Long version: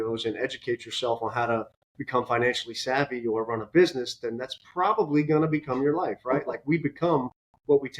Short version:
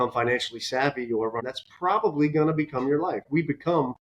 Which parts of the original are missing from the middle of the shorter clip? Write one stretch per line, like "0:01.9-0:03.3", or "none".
0:03.6-0:04.4
0:06.2-0:06.6

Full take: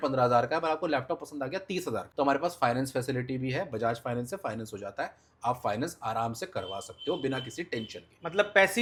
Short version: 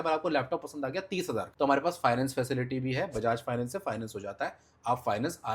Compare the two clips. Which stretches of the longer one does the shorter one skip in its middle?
none

